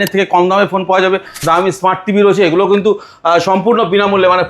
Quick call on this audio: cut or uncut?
cut